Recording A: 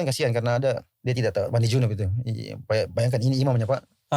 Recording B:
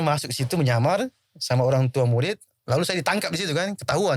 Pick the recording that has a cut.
A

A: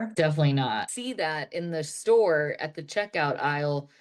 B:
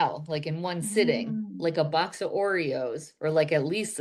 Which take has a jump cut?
A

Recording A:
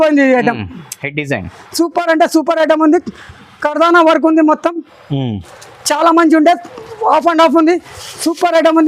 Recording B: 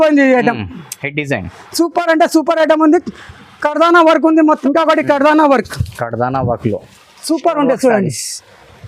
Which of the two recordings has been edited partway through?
B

